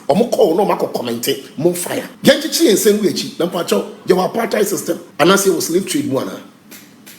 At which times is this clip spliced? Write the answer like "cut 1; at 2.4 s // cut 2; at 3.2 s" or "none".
cut 1; at 2.1 s // cut 2; at 5.0 s